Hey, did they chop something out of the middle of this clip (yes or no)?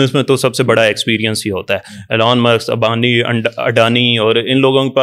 no